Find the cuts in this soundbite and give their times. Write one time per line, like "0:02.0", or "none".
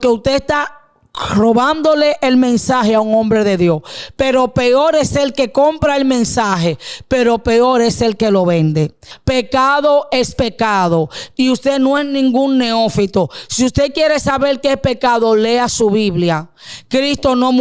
0:09.1